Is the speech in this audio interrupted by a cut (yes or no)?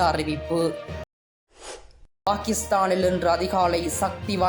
no